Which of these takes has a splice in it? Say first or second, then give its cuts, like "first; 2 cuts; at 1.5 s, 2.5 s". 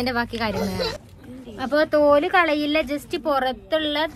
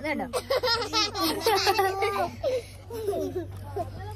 first; 1 cut; at 1.0 s